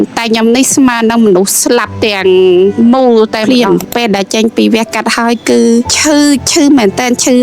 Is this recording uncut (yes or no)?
no